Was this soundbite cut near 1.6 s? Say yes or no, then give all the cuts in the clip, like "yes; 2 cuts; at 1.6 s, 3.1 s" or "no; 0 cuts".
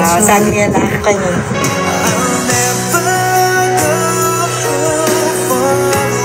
yes; 1 cut; at 1.6 s